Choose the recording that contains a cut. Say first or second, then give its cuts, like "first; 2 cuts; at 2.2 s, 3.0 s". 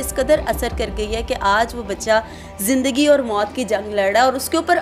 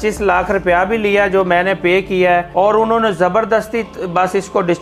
second; 1 cut; at 2.5 s